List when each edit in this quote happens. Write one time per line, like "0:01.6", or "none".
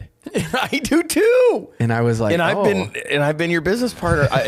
none